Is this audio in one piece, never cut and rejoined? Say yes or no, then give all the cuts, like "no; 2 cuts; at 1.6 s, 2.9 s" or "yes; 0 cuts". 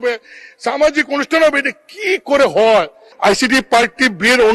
no; 1 cut; at 3.0 s